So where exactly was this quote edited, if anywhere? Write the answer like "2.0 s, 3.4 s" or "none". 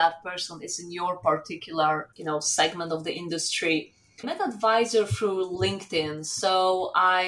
2.1 s, 4.2 s